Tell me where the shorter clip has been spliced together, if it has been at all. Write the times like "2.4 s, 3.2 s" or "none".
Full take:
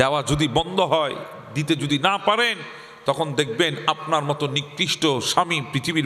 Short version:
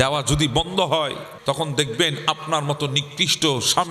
1.3 s